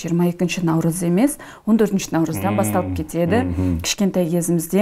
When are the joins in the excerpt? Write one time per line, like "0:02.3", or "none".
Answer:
none